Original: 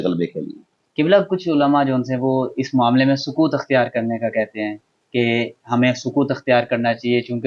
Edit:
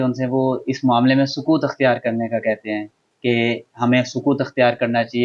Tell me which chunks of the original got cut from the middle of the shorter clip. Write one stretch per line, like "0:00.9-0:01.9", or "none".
none

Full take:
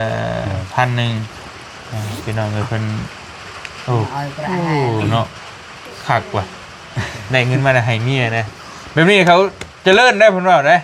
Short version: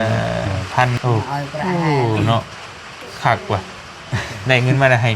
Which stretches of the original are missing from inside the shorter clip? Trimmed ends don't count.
0:00.9-0:03.8

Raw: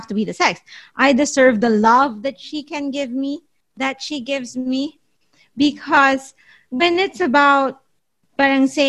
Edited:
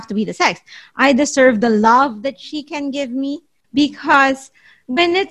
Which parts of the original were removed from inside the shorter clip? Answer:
0:03.5-0:05.4

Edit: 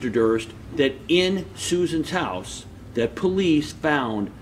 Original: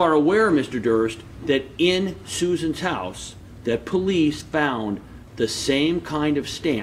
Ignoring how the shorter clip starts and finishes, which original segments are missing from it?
none

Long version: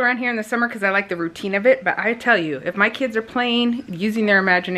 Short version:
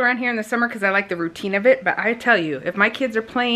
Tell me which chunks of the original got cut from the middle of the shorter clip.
none

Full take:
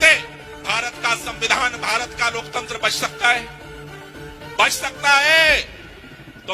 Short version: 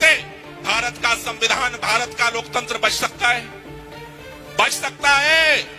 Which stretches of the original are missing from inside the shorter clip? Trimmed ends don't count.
none

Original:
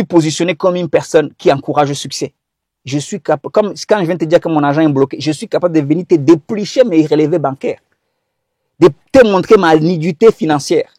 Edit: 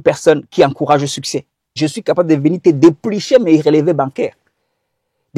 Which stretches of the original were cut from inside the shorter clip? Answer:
0:02.6-0:05.2

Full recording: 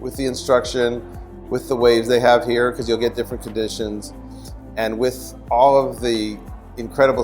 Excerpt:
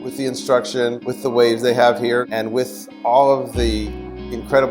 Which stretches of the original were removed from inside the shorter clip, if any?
0:01.1-0:01.5
0:02.7-0:04.7

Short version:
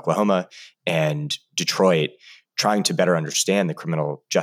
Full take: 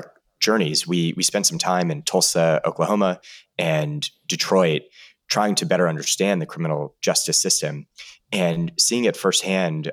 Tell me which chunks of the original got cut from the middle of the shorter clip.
none

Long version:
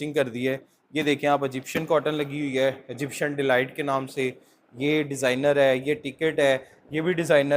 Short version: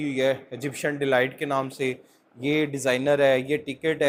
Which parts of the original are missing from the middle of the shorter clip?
none

